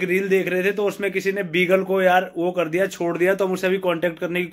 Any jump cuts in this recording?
no; 0 cuts

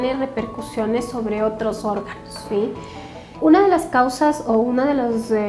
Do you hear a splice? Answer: no; 0 cuts

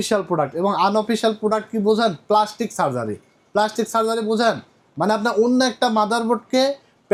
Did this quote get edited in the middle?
no; 0 cuts

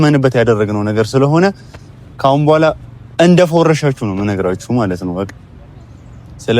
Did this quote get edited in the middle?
no; 0 cuts

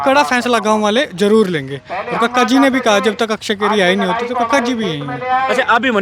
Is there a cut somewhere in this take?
no; 0 cuts

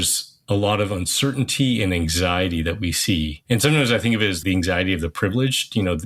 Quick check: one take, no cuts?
no; 2 cuts; at 3.4 s, 4.4 s

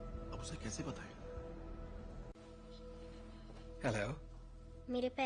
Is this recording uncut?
yes; 0 cuts

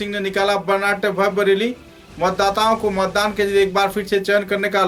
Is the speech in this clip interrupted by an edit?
no; 0 cuts

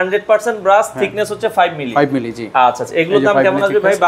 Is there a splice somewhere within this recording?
no; 0 cuts

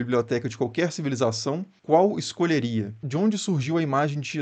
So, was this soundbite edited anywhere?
yes; 1 cut; at 3.1 s

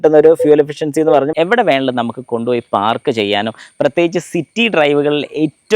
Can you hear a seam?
yes; 1 cut; at 1.3 s

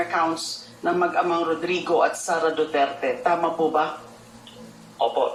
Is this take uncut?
yes; 0 cuts

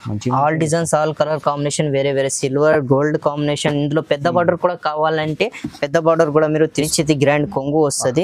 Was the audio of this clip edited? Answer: yes; 1 cut; at 6.8 s

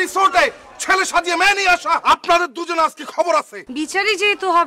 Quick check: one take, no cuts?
no; 2 cuts; at 2.0 s, 3.6 s

